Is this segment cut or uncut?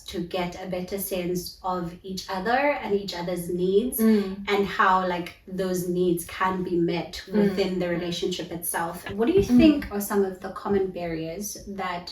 cut